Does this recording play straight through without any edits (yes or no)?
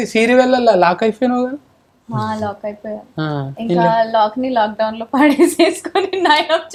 yes